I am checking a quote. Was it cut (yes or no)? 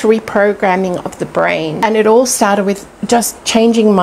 yes